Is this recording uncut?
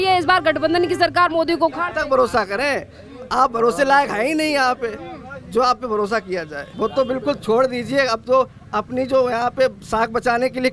no; 1 cut; at 6.6 s

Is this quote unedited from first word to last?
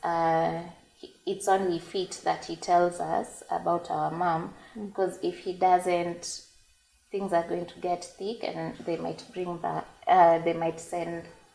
yes; 0 cuts

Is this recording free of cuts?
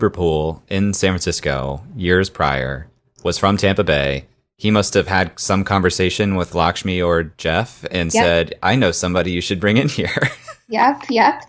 yes; 0 cuts

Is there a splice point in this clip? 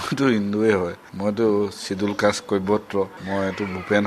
yes; 2 cuts; at 1.0 s, 3.2 s

